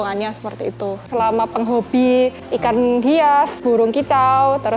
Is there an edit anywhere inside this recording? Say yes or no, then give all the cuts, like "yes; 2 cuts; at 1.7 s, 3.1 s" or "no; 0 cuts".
yes; 1 cut; at 1.1 s